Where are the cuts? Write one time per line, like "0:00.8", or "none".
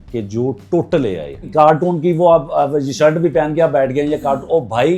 0:01.5